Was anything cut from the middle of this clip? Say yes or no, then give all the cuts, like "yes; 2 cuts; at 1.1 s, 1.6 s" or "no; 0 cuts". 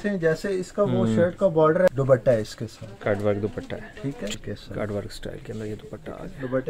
yes; 2 cuts; at 1.9 s, 4.3 s